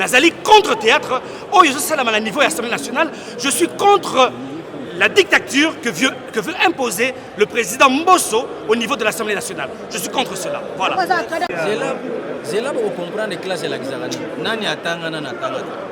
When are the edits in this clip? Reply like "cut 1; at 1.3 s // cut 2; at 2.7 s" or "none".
cut 1; at 11.5 s